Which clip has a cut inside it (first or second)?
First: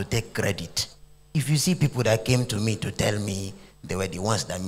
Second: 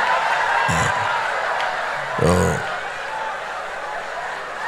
first